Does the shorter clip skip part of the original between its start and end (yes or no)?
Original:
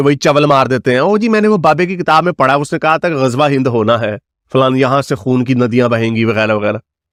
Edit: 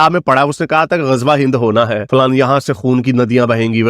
yes